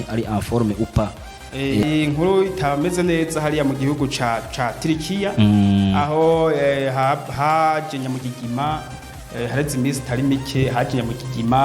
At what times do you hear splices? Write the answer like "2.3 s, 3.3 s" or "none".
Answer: 1.8 s